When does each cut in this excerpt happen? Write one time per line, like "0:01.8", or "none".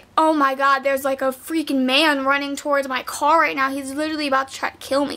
none

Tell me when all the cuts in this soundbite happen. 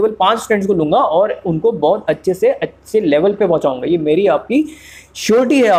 none

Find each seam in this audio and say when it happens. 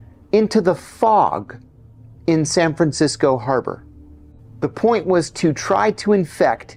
none

